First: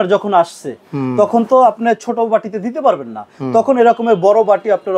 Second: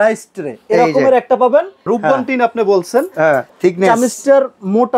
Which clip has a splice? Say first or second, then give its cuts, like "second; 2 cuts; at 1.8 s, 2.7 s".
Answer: second; 2 cuts; at 1.9 s, 3.5 s